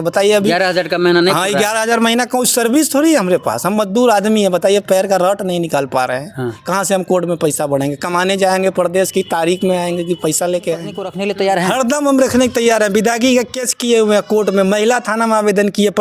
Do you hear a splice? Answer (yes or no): yes